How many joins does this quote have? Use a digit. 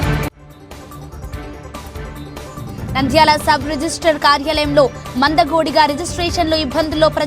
2